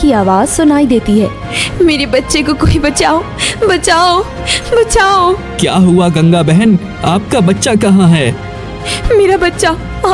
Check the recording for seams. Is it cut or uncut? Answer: uncut